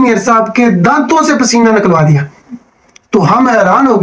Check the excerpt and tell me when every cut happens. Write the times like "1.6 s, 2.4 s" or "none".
none